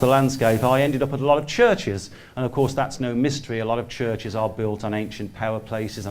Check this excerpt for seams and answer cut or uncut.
uncut